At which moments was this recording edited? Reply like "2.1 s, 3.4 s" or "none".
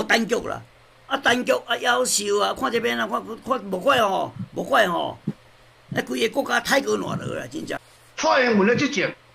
7.7 s